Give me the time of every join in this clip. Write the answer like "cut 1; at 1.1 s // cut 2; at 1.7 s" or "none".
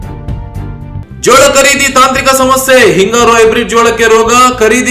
cut 1; at 1.0 s